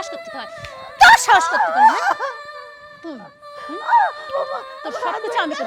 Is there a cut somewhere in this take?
yes; 1 cut; at 4.2 s

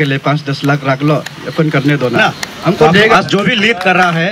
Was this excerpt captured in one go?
no; 1 cut; at 3.1 s

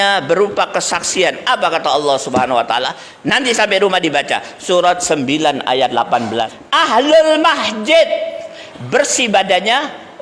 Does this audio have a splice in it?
yes; 1 cut; at 6.5 s

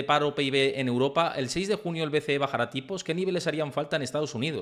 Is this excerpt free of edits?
yes; 0 cuts

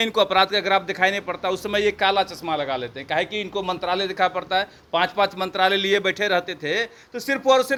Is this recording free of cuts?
yes; 0 cuts

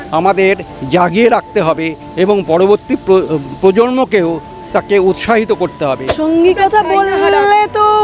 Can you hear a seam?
yes; 1 cut; at 6.1 s

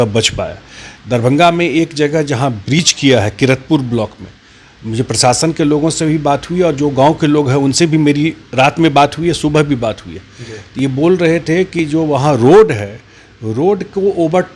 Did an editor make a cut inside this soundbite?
no; 0 cuts

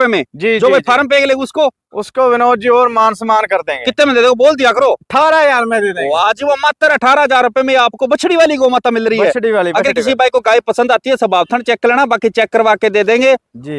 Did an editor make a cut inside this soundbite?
no; 0 cuts

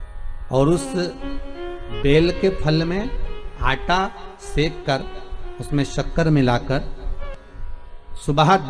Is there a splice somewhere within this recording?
yes; 1 cut; at 7.2 s

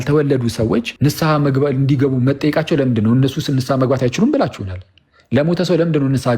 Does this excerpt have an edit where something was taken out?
yes; 1 cut; at 0.9 s

